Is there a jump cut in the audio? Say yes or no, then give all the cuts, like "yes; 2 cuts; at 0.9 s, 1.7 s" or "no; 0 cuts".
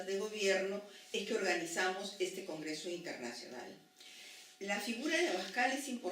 yes; 1 cut; at 3.4 s